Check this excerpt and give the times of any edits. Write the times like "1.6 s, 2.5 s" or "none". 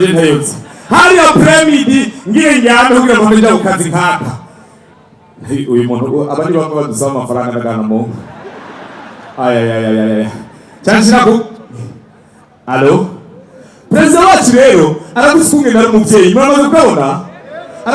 none